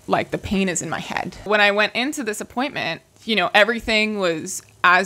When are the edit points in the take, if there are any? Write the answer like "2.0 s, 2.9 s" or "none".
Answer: 1.5 s, 3.1 s